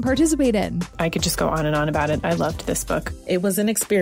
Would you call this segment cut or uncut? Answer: uncut